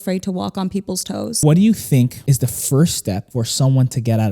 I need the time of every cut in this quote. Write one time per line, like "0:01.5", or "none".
0:01.3
0:02.2
0:03.3